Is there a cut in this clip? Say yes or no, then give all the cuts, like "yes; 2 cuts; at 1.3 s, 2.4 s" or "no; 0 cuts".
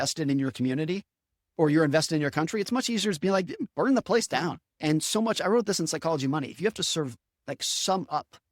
yes; 1 cut; at 4.6 s